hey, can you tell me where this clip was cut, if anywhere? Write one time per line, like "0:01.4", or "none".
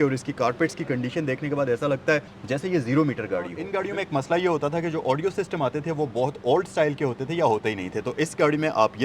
0:03.7